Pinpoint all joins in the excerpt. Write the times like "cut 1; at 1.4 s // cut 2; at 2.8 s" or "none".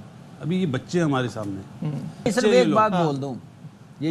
cut 1; at 2.3 s